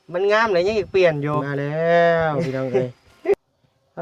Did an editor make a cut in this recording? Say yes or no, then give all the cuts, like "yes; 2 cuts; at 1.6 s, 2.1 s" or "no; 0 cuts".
yes; 3 cuts; at 1.4 s, 2.7 s, 3.3 s